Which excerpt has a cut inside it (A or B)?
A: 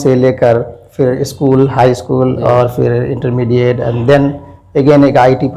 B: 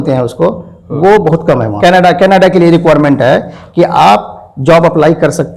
B